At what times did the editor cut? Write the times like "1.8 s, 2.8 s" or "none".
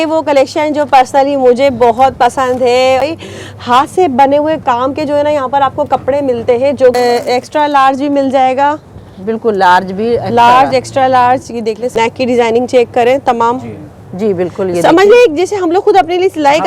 3.0 s, 7.0 s, 11.9 s